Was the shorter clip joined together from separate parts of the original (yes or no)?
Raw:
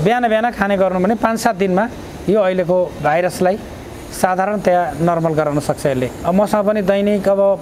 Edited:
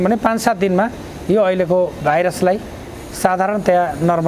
no